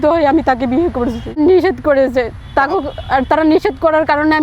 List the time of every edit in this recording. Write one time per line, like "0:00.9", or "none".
0:01.4